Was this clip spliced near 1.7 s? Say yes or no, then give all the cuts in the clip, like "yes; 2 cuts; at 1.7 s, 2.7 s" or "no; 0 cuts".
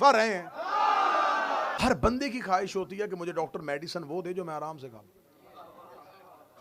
yes; 1 cut; at 1.7 s